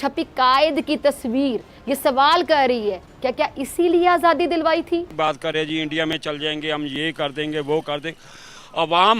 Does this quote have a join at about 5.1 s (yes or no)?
yes